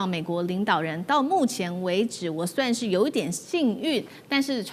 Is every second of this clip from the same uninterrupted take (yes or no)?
yes